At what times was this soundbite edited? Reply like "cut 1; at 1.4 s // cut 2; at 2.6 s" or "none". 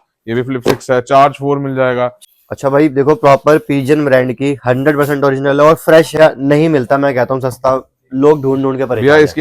cut 1; at 2.3 s // cut 2; at 6.2 s